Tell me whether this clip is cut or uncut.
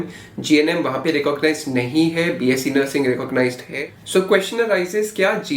cut